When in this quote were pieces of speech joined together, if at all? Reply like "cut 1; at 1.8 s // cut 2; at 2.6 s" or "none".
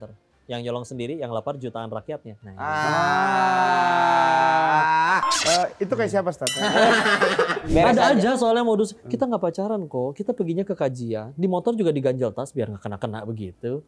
cut 1; at 7.7 s